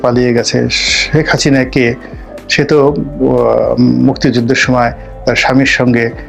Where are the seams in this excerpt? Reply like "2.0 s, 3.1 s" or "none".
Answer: none

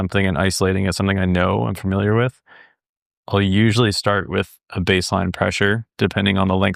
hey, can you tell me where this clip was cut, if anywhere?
none

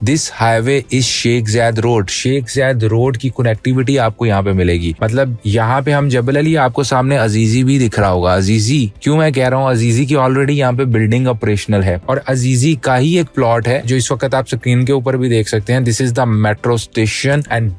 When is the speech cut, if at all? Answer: none

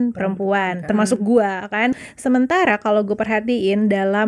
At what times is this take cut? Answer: 2.0 s

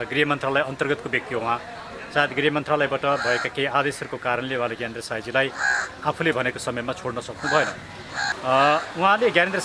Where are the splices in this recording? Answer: 8.3 s

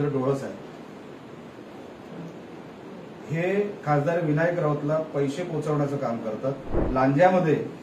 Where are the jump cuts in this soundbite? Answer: 6.7 s

